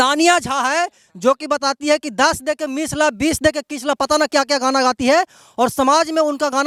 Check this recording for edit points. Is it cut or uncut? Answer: uncut